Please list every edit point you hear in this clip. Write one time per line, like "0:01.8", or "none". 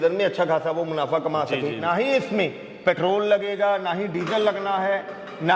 0:01.8